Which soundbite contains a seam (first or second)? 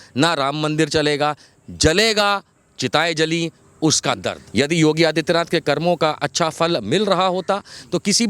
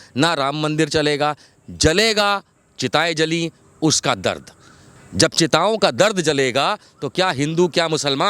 first